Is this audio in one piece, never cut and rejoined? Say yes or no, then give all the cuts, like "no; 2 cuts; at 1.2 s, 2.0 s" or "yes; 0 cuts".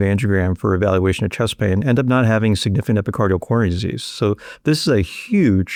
yes; 0 cuts